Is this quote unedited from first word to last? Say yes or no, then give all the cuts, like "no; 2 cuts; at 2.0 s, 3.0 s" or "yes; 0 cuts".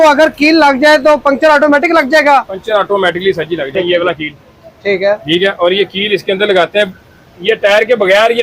no; 1 cut; at 3.7 s